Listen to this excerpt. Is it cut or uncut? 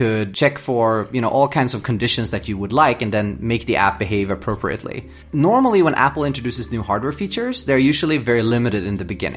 cut